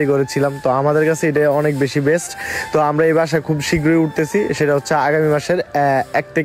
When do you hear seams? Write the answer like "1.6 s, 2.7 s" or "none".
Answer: none